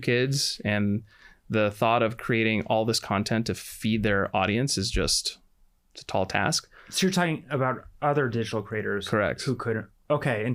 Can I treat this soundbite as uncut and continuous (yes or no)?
yes